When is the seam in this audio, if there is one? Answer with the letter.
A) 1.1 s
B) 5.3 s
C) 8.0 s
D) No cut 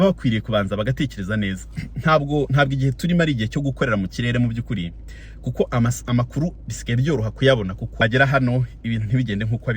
C